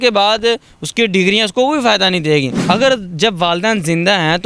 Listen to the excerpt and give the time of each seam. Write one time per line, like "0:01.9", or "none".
0:02.5